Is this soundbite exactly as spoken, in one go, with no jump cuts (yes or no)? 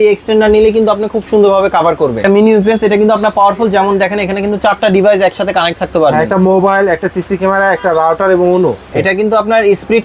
no